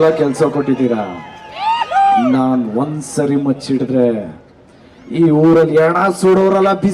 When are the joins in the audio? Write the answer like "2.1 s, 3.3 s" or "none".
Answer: none